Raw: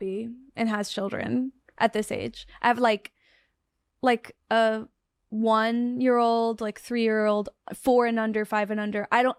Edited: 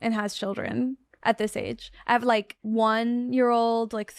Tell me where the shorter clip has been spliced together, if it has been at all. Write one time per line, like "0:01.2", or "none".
0:02.5